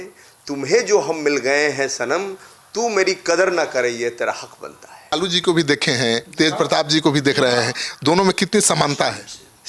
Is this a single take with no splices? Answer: no; 1 cut; at 5.1 s

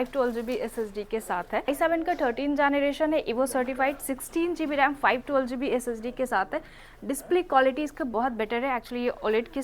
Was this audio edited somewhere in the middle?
yes; 1 cut; at 1.7 s

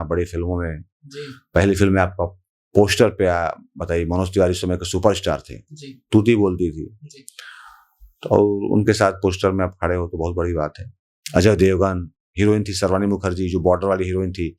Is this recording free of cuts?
yes; 0 cuts

